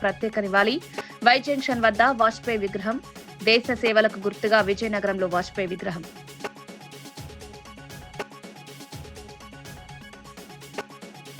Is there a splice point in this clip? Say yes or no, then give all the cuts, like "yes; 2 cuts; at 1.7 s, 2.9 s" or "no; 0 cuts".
no; 0 cuts